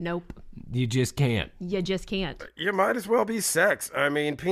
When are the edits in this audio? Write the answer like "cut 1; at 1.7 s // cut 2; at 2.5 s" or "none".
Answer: cut 1; at 2.6 s

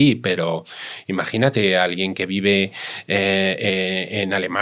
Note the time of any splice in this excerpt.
none

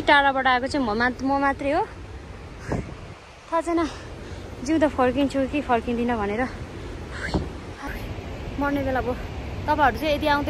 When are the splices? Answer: none

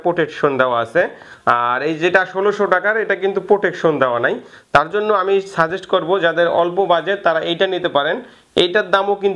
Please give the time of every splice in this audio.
none

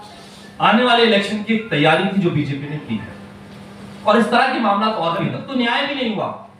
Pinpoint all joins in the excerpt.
cut 1; at 5.3 s

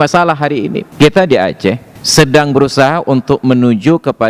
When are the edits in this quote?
cut 1; at 0.8 s // cut 2; at 1.9 s

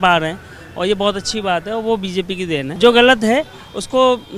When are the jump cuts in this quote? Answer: cut 1; at 2.7 s

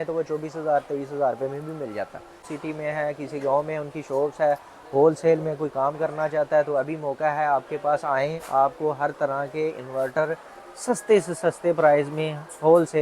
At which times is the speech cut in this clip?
cut 1; at 2.5 s

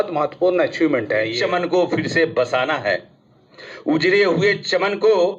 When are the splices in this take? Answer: cut 1; at 1.3 s

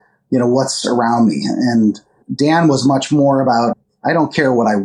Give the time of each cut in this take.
cut 1; at 2.3 s // cut 2; at 3.8 s

